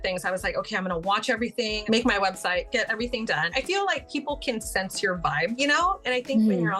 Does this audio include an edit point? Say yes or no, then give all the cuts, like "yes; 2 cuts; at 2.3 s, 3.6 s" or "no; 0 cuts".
yes; 1 cut; at 3.5 s